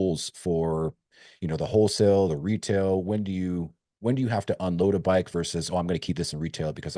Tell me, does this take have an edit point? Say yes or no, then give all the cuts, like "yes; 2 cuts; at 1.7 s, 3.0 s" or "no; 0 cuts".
no; 0 cuts